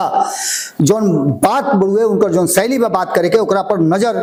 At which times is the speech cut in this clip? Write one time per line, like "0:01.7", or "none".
none